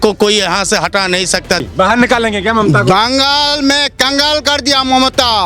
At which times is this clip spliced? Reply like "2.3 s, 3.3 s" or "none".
1.6 s